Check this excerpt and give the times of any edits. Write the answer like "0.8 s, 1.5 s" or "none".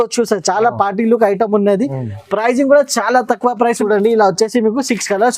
3.8 s